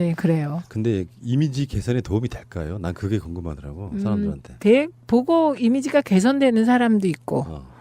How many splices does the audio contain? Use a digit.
1